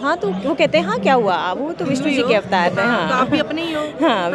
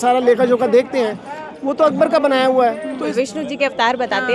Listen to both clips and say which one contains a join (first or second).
second